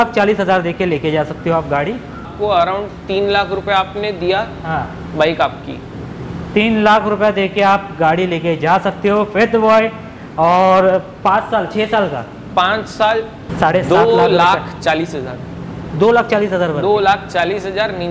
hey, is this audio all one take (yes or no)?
no